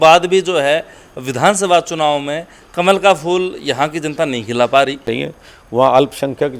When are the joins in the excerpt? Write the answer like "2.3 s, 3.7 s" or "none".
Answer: 5.1 s